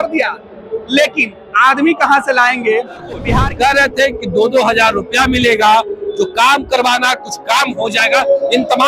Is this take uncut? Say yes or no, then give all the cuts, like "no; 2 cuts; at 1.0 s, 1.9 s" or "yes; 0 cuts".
no; 1 cut; at 3.3 s